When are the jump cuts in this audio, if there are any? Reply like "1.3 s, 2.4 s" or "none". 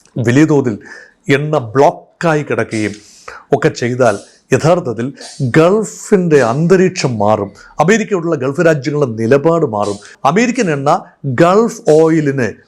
10.1 s